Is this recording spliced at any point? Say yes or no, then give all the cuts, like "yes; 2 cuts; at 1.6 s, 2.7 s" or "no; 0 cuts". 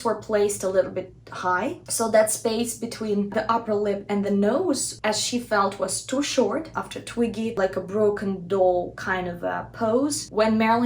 yes; 2 cuts; at 1.8 s, 6.7 s